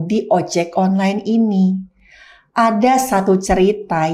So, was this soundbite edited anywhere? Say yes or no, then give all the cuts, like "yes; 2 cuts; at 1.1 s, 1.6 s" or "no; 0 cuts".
no; 0 cuts